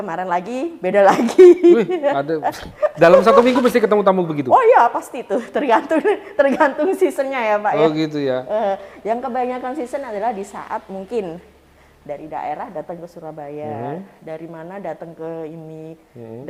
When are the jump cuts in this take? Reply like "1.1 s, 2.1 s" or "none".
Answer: none